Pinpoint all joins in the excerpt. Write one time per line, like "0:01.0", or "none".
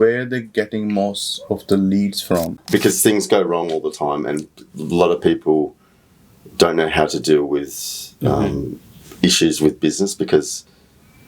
0:02.6